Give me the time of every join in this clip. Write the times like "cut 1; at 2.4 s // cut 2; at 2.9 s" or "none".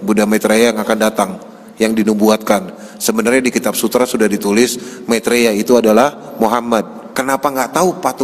cut 1; at 7.0 s